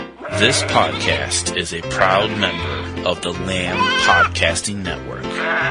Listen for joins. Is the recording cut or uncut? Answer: uncut